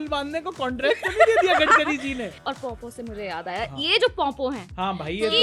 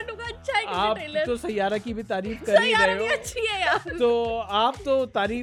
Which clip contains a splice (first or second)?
first